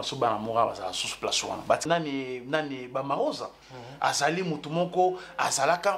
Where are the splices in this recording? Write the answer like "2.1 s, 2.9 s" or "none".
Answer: 1.8 s